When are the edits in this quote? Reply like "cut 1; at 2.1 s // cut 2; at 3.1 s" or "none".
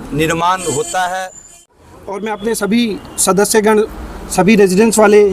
cut 1; at 1.6 s